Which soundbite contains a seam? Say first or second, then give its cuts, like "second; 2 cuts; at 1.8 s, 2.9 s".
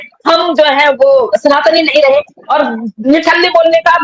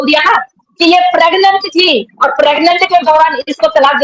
first; 1 cut; at 2.4 s